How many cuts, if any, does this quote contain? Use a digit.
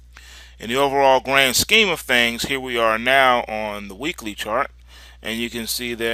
0